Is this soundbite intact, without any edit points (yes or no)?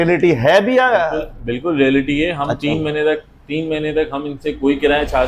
yes